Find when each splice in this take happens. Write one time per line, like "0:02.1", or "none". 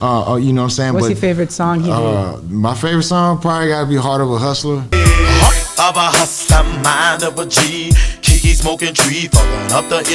none

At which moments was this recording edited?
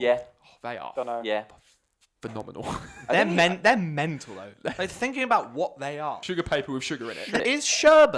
0:06.2
0:07.4

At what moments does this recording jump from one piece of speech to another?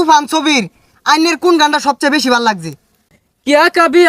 0:03.0

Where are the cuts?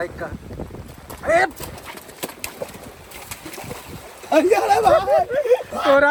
none

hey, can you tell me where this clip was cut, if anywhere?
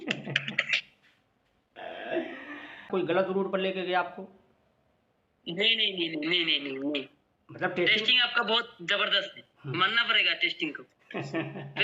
0:02.9

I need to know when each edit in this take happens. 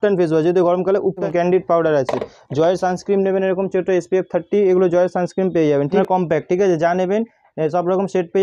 0:01.2
0:06.0

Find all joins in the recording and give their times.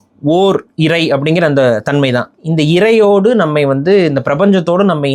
none

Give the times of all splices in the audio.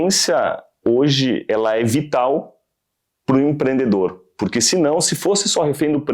0:01.4

